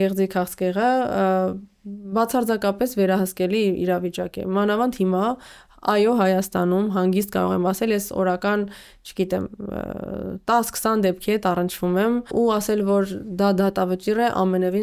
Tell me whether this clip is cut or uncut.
uncut